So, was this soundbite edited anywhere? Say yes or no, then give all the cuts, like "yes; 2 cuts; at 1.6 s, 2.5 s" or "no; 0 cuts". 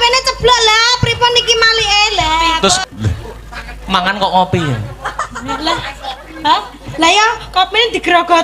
yes; 1 cut; at 2.8 s